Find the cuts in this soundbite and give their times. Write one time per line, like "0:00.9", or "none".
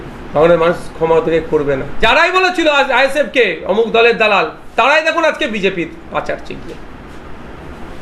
0:01.9